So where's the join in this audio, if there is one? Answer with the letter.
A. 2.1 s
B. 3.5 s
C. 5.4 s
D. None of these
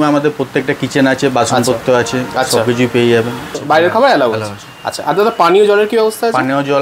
B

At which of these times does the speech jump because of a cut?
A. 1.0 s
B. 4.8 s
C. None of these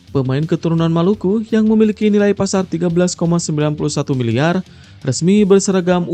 C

